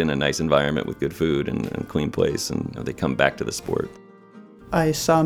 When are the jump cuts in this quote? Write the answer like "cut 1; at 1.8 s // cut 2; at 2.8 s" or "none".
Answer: cut 1; at 2.8 s // cut 2; at 4.4 s